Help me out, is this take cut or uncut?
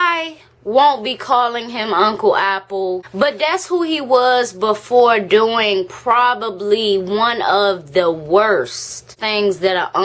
cut